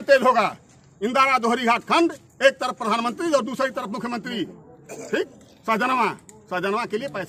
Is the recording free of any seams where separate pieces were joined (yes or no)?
yes